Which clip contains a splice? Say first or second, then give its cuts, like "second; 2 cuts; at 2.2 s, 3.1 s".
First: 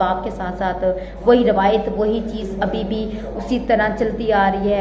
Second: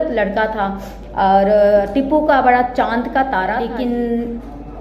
second; 1 cut; at 3.6 s